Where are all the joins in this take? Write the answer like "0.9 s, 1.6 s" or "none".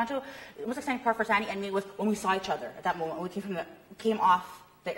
none